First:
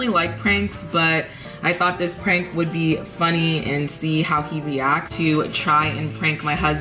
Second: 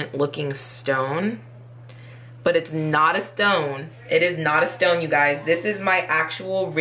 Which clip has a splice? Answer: first; 1 cut; at 5.1 s

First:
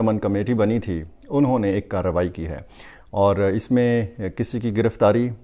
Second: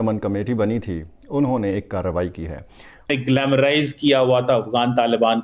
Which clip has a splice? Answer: second; 1 cut; at 3.1 s

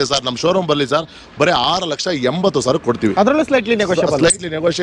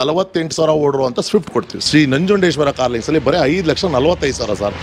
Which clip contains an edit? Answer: second; 1 cut; at 1.8 s

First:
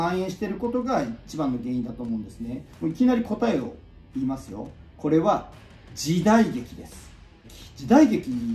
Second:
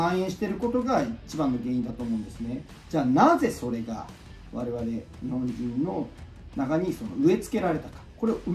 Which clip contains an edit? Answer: first; 3 cuts; at 2.7 s, 4.7 s, 7.5 s

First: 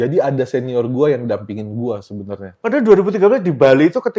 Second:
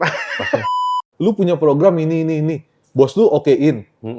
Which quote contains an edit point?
second; 1 cut; at 1.0 s

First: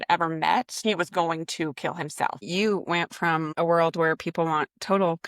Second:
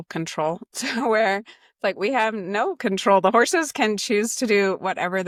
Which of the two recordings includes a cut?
first; 3 cuts; at 0.8 s, 2.4 s, 3.5 s

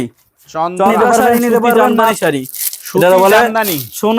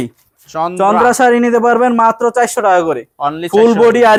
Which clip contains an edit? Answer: first; 1 cut; at 2.2 s

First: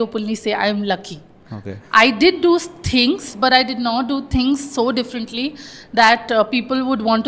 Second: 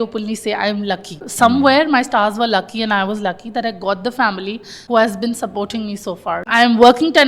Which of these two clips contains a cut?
second; 3 cuts; at 1.3 s, 4.7 s, 6.5 s

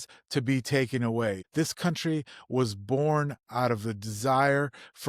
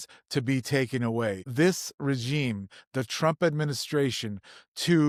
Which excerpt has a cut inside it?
first; 1 cut; at 1.4 s

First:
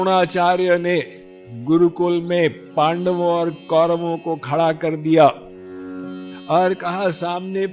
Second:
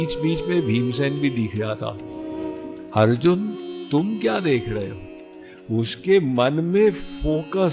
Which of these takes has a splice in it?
second; 2 cuts; at 2.2 s, 5.5 s

